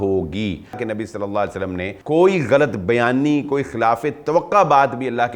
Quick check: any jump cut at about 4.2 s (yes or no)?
no